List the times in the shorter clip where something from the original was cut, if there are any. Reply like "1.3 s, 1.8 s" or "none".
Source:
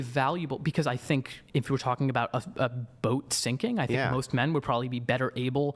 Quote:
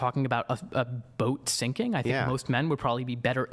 none